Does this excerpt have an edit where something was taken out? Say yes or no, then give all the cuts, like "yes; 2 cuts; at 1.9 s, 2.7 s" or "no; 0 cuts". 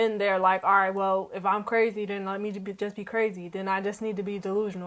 no; 0 cuts